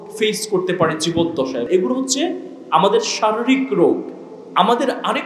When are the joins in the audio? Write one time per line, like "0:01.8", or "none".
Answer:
0:01.7